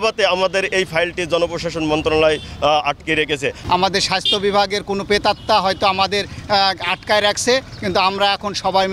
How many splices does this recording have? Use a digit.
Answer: 0